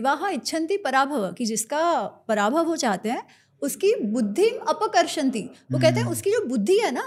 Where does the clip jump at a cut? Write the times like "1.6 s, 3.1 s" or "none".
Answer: none